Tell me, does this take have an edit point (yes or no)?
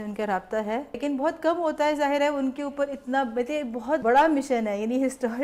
yes